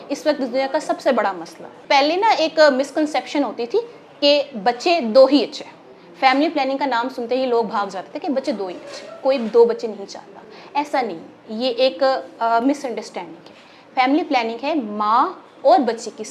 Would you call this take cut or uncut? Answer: cut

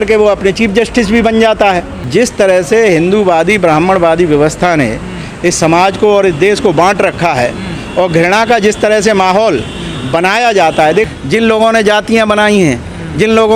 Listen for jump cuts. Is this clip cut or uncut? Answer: cut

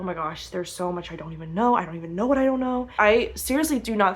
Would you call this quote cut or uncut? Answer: cut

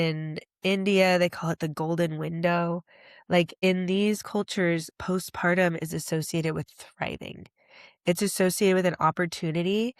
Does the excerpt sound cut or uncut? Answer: cut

